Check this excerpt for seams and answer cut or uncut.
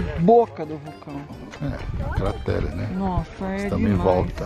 uncut